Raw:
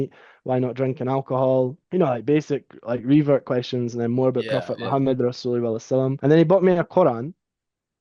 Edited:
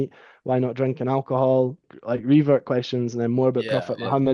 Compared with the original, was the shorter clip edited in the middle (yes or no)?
yes